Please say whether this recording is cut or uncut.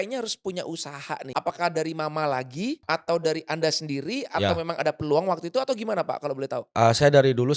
cut